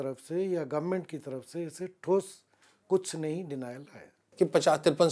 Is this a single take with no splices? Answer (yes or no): no